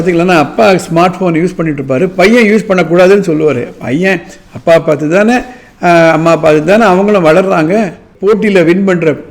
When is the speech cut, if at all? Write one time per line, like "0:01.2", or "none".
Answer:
0:08.1

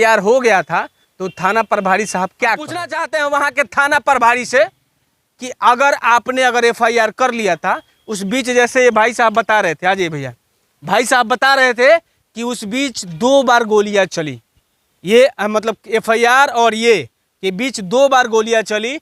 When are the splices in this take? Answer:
0:03.0

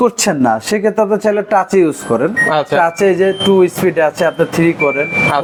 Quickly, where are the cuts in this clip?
none

